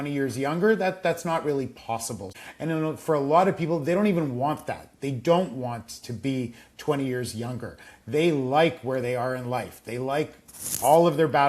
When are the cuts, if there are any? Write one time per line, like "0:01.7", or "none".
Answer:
0:02.4